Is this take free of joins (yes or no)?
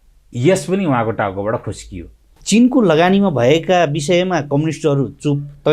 no